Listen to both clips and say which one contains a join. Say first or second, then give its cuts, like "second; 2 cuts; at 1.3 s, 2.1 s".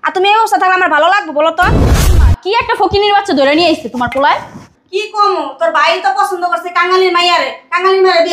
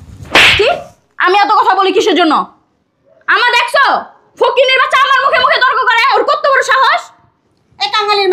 first; 1 cut; at 2.2 s